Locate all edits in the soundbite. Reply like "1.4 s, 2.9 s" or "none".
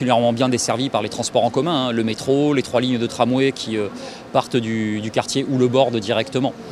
4.5 s